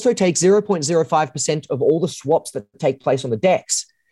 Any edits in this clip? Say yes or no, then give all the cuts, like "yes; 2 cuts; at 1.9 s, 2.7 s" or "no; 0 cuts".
no; 0 cuts